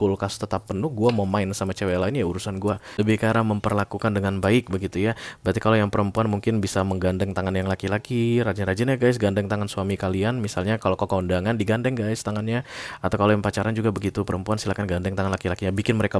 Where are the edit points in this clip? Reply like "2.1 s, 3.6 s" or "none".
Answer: 2.9 s